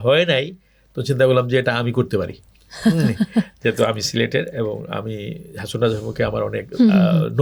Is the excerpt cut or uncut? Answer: uncut